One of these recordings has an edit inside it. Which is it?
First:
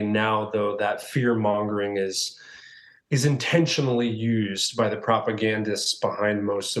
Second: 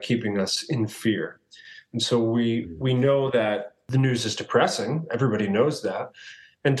second; 1 cut; at 3.8 s

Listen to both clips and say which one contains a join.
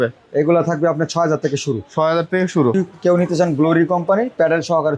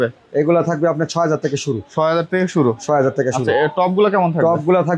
first; 1 cut; at 2.8 s

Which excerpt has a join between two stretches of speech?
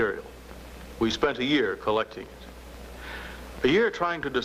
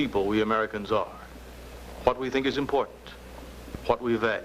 second; 1 cut; at 2.9 s

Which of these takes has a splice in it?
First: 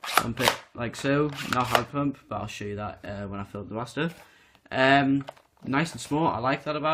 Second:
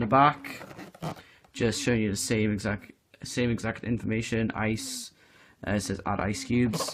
second; 1 cut; at 3.2 s

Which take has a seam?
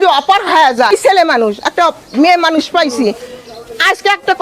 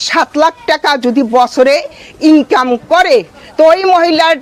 first; 1 cut; at 0.9 s

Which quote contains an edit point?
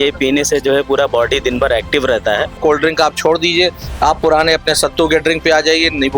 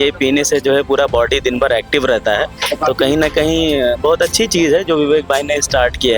first; 1 cut; at 2.6 s

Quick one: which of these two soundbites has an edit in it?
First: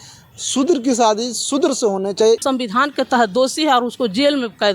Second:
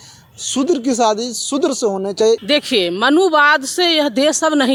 first; 1 cut; at 2.4 s

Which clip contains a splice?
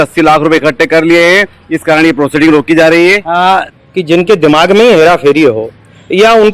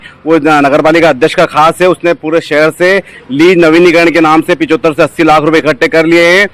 first; 1 cut; at 3.7 s

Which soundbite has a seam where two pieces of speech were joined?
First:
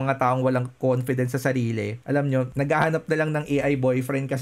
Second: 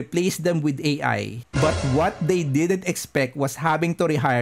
second; 1 cut; at 1.4 s

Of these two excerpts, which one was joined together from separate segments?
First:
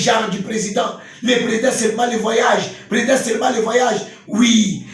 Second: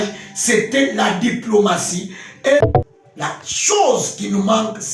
second; 1 cut; at 2.6 s

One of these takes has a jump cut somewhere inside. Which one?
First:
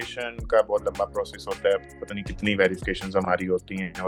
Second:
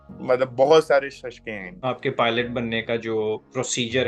second; 1 cut; at 1.7 s

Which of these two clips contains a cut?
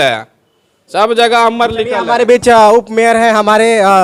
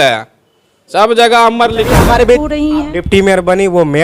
second; 1 cut; at 2.4 s

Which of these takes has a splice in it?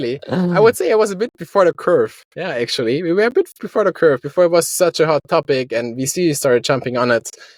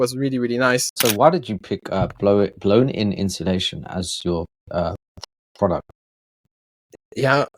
second; 1 cut; at 1.0 s

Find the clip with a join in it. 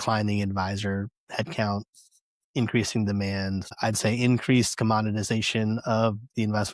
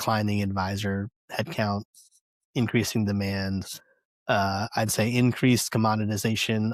first; 1 cut; at 3.7 s

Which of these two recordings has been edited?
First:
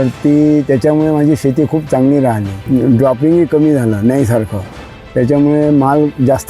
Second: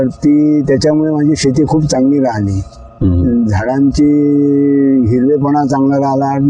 first; 1 cut; at 2.5 s

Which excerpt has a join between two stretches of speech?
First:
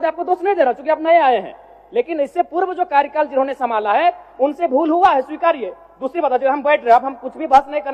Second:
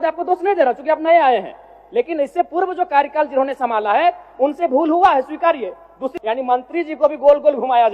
second; 1 cut; at 6.0 s

